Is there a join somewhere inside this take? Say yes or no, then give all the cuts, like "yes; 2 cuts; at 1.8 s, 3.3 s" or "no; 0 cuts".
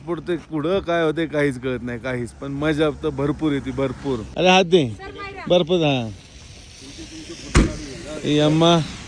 no; 0 cuts